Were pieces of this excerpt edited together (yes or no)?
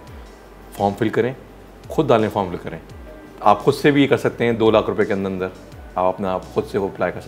no